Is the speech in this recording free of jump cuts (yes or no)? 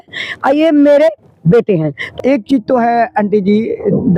no